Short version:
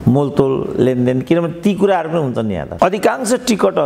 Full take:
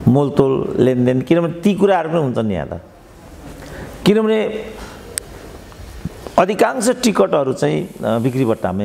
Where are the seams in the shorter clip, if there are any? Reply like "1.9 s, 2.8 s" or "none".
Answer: 2.7 s